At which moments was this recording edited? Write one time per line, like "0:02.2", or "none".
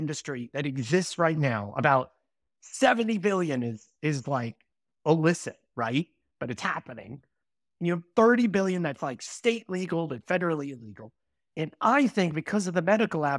none